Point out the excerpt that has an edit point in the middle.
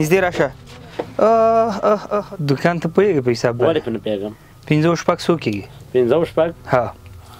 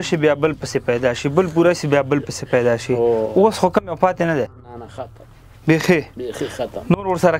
first; 1 cut; at 2.2 s

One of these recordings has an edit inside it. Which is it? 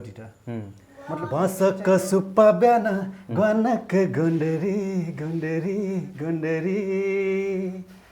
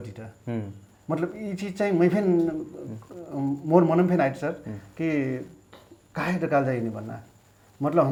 first; 1 cut; at 1.3 s

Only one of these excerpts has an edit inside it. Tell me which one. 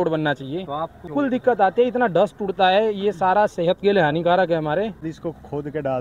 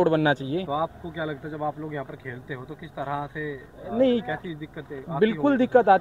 first; 2 cuts; at 1.1 s, 5.1 s

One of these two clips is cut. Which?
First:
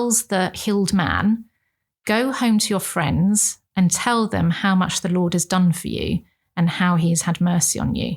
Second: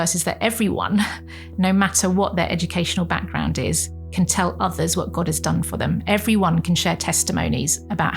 second; 1 cut; at 5.7 s

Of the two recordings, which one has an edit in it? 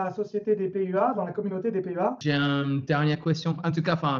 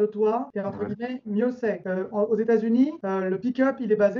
first; 1 cut; at 2.2 s

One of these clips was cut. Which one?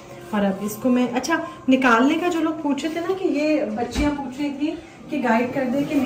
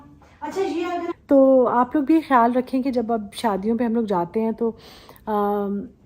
second; 1 cut; at 1.1 s

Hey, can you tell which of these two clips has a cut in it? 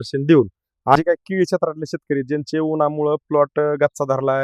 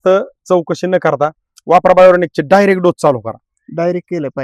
first; 1 cut; at 1.0 s

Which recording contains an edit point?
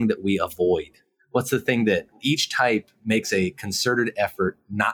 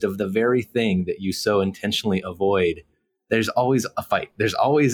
second; 1 cut; at 4.0 s

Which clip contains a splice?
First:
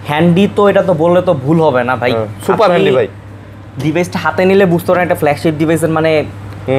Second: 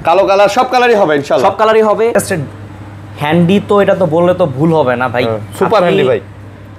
second; 1 cut; at 2.1 s

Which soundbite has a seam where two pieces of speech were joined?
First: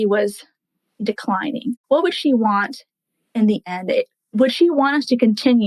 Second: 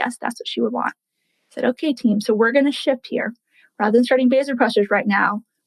first; 2 cuts; at 1.8 s, 4.3 s

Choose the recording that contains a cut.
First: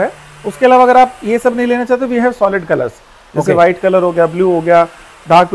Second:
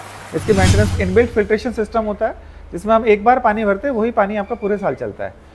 second; 1 cut; at 0.9 s

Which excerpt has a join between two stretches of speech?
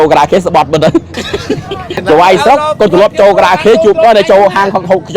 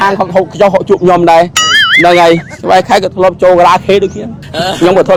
first; 1 cut; at 2.0 s

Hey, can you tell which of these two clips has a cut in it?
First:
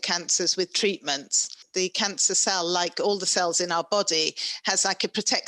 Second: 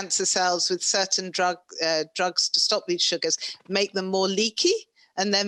first; 1 cut; at 1.6 s

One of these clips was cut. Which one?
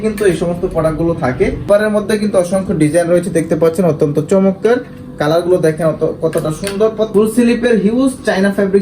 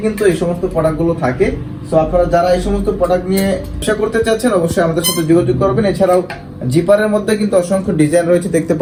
first; 2 cuts; at 1.7 s, 7.1 s

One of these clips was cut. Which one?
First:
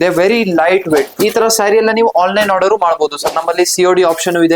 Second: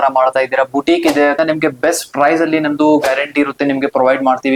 first; 1 cut; at 1.1 s

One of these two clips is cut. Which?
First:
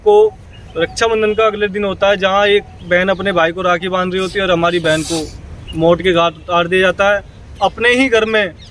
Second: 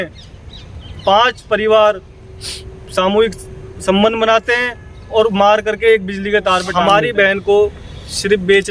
second; 1 cut; at 6.7 s

